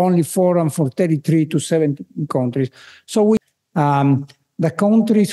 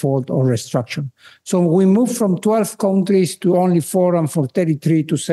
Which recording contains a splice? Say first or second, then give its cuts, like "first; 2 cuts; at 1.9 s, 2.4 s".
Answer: first; 1 cut; at 3.4 s